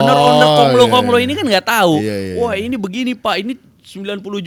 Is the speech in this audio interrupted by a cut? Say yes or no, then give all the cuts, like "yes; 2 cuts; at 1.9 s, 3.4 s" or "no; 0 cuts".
no; 0 cuts